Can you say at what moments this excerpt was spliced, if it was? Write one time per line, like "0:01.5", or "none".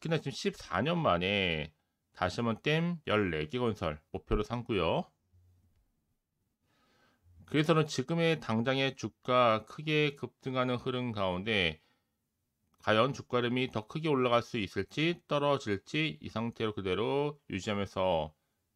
0:04.1